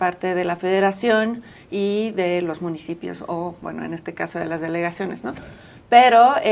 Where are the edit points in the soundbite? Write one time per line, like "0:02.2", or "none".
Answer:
0:03.6